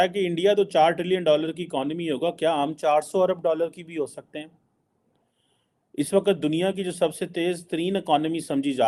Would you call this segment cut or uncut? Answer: uncut